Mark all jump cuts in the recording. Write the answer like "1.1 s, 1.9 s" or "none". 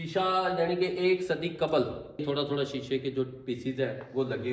2.2 s